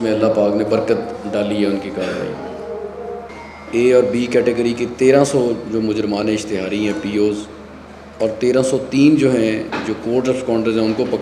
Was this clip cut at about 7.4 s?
no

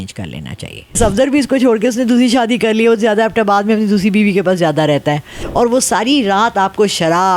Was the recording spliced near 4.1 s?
no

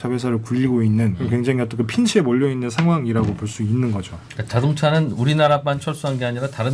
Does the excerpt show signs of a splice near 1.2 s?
yes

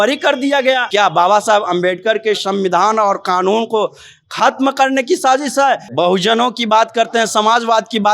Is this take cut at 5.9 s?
yes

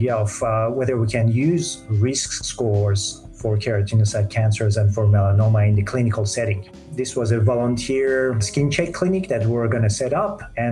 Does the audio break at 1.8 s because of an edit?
no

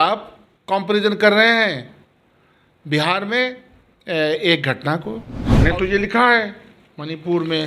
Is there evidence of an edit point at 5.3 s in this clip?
yes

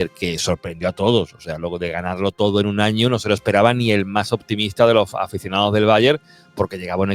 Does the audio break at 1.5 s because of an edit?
no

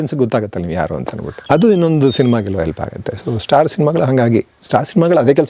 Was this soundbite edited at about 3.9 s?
no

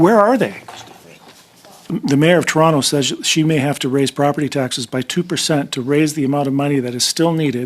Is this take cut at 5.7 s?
no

